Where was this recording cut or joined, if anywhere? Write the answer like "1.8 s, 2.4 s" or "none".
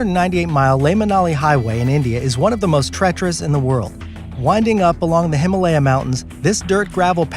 1.4 s